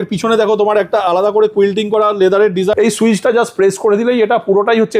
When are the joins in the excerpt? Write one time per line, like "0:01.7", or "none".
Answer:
0:02.7